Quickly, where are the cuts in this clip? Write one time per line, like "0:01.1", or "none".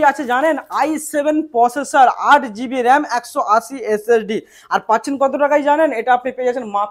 none